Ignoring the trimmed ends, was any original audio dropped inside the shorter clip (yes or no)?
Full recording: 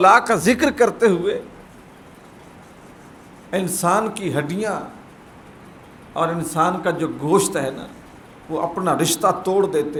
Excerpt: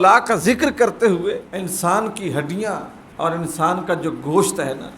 yes